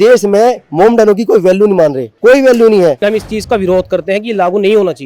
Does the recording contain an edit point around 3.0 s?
yes; 1 cut; at 3.0 s

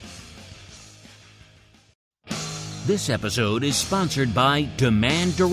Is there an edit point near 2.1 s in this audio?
yes; 1 cut; at 2.1 s

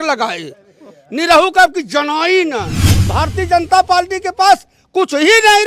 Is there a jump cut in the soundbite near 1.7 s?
no; 1 cut; at 3.0 s

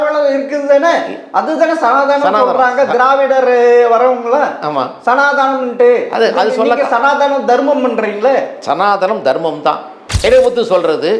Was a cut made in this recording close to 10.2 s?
yes; 1 cut; at 10.2 s

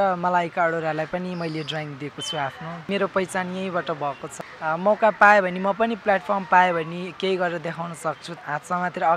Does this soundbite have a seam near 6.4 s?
no; 3 cuts; at 2.9 s, 4.3 s, 8.3 s

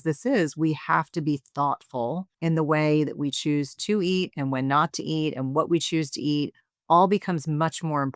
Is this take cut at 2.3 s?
yes; 1 cut; at 2.3 s

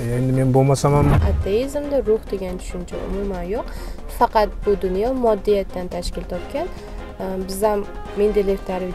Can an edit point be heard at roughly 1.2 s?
yes; 1 cut; at 1.2 s

